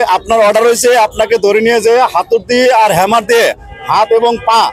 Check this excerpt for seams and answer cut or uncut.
uncut